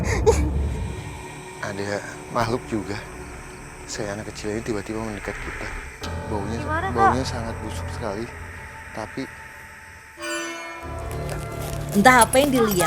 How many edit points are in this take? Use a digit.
1